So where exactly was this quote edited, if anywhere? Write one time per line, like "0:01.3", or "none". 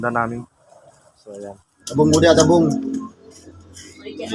0:01.8